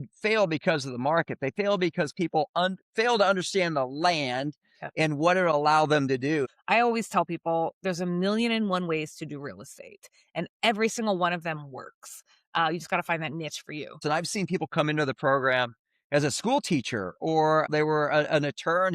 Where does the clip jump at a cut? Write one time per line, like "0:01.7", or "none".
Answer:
0:06.5
0:14.0
0:17.7

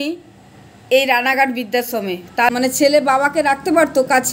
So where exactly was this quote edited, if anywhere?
0:02.5

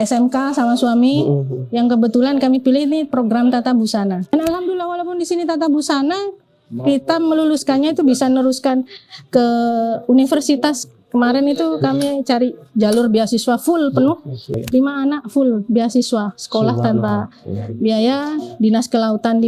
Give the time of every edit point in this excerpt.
0:04.3
0:14.6

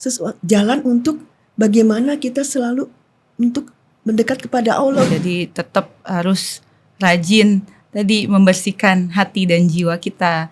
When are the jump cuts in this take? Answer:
0:05.1

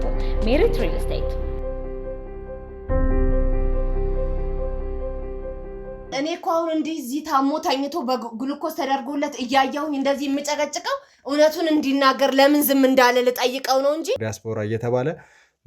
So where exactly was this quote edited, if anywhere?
0:06.1
0:14.3

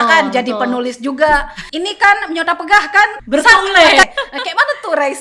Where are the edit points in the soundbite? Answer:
0:01.6
0:03.2
0:04.0

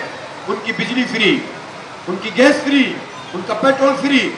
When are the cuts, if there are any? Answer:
none

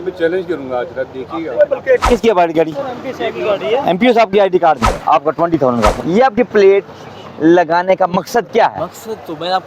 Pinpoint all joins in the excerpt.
0:02.0
0:04.9
0:06.0

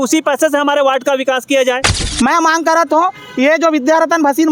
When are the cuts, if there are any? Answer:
0:02.0

